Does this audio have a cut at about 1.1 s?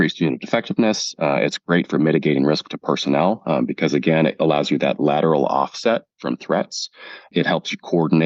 no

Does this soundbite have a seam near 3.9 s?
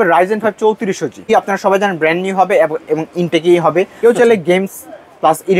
yes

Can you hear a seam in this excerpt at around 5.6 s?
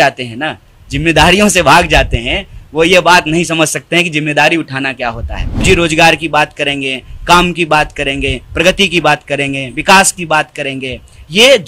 yes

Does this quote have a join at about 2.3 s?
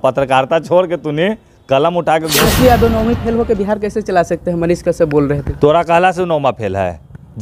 yes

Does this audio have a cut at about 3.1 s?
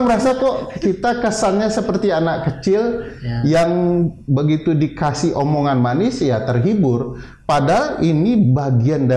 no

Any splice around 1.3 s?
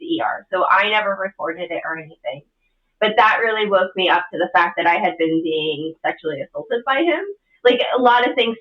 no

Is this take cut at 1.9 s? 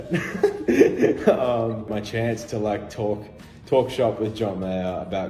yes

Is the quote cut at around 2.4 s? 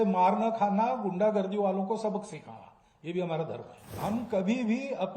no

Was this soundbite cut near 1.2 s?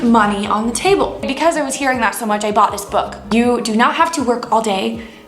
yes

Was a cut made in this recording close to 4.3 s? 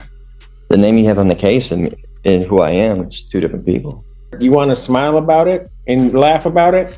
yes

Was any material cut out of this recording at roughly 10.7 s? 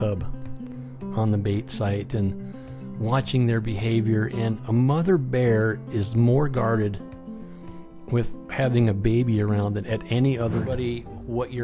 yes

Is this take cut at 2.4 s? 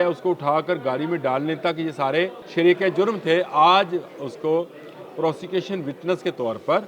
yes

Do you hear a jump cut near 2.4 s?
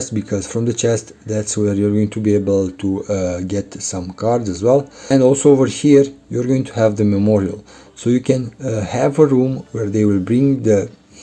no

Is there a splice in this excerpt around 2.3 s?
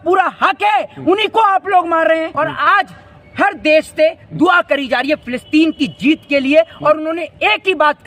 yes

